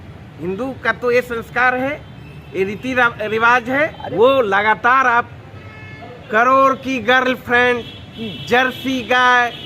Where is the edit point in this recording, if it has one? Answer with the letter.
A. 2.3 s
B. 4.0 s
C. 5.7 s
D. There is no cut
B